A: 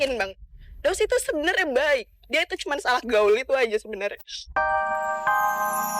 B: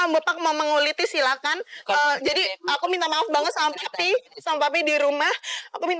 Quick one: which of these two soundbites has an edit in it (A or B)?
A